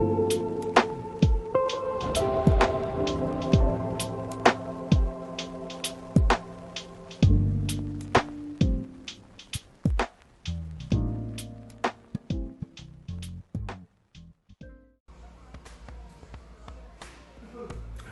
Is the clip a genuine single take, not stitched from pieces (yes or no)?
no